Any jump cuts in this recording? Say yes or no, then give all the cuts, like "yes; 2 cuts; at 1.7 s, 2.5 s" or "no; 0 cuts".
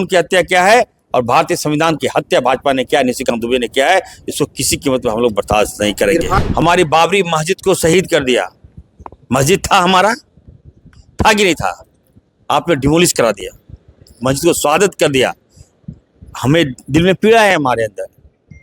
yes; 1 cut; at 6.4 s